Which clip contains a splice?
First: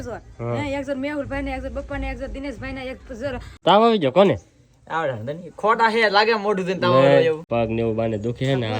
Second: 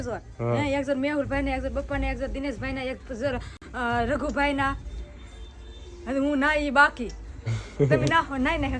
first; 2 cuts; at 3.4 s, 7.4 s

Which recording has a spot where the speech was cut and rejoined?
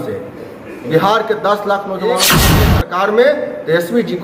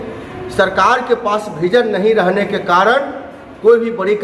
first; 1 cut; at 2.5 s

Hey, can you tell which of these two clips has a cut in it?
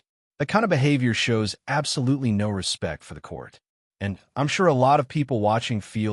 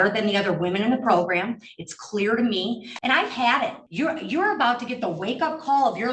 second; 2 cuts; at 2.9 s, 3.8 s

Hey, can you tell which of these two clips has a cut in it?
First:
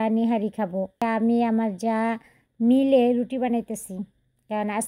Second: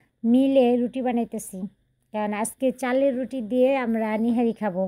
first; 1 cut; at 1.0 s

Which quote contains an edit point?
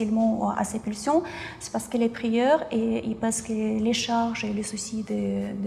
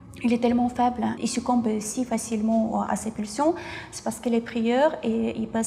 second; 1 cut; at 1.2 s

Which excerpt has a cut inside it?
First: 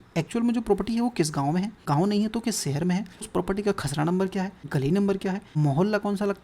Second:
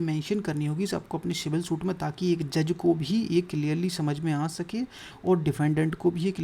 first; 4 cuts; at 1.8 s, 3.3 s, 4.6 s, 5.5 s

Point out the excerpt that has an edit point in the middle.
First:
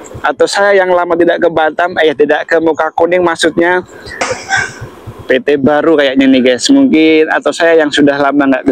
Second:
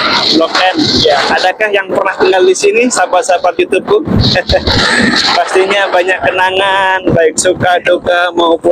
first; 1 cut; at 4.2 s

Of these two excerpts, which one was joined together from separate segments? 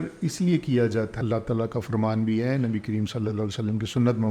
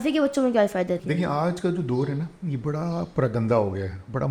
first; 1 cut; at 1.1 s

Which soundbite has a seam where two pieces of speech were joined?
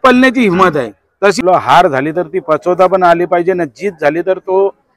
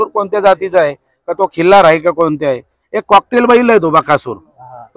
first; 1 cut; at 1.4 s

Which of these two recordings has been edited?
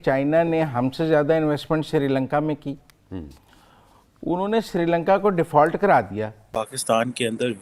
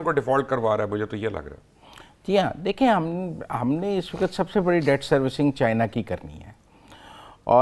first; 1 cut; at 6.5 s

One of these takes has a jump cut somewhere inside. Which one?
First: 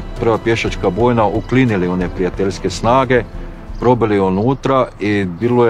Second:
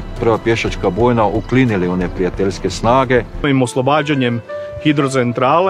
second; 1 cut; at 3.4 s

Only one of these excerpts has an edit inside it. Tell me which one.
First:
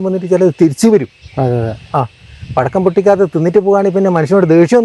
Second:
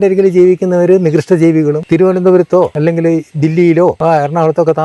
second; 3 cuts; at 1.8 s, 2.7 s, 4.0 s

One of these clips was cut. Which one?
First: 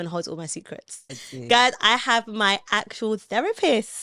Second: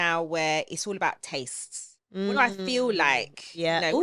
first; 1 cut; at 1.2 s

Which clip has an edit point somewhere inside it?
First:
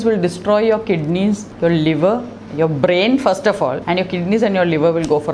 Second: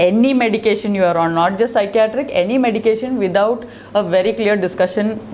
first; 2 cuts; at 1.5 s, 3.8 s

